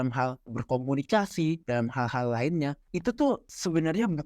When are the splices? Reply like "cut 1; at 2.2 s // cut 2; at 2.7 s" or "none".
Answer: cut 1; at 2.9 s